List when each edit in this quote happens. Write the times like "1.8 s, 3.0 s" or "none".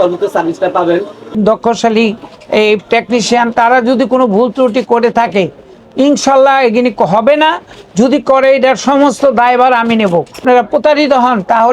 1.4 s, 10.3 s